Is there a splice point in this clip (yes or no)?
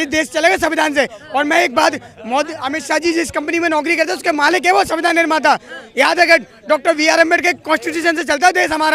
no